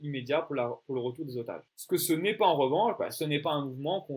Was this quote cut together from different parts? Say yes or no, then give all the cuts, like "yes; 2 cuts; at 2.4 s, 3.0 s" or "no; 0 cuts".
yes; 1 cut; at 1.7 s